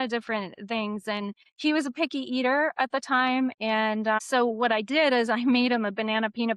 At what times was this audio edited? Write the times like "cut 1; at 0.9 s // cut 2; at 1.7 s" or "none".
cut 1; at 1.4 s